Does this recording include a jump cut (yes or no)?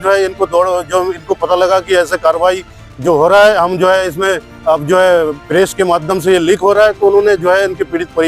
no